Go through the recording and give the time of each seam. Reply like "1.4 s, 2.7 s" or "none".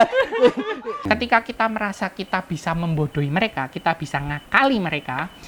1.0 s